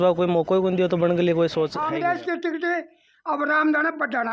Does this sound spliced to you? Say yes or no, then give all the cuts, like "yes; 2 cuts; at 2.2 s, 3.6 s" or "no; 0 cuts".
yes; 1 cut; at 1.8 s